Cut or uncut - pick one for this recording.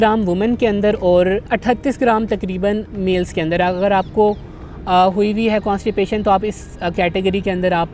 uncut